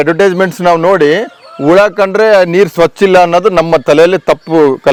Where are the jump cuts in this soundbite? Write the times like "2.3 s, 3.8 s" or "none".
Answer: none